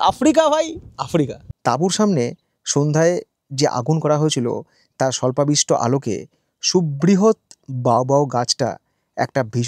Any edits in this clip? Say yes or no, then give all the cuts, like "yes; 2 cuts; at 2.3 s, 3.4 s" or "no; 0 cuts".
yes; 1 cut; at 1.4 s